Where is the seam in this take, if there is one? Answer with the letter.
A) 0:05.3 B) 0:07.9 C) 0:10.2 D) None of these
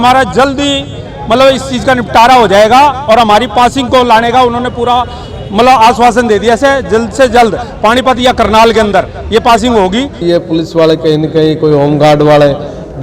C